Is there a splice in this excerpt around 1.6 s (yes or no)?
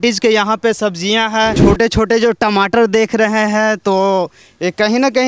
yes